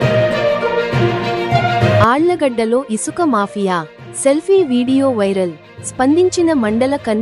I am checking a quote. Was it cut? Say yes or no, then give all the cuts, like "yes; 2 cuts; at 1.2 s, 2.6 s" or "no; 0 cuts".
no; 0 cuts